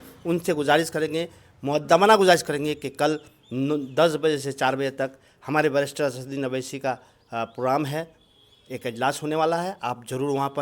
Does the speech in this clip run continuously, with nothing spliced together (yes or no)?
yes